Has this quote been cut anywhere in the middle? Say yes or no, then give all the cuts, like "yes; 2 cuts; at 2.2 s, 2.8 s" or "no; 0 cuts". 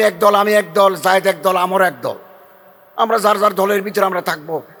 no; 0 cuts